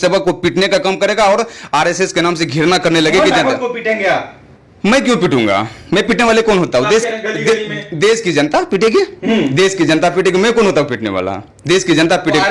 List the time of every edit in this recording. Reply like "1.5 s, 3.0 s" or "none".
none